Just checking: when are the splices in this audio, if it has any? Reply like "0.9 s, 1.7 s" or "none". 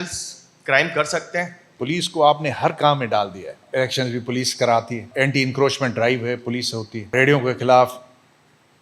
1.8 s, 3.6 s, 5.1 s, 7.1 s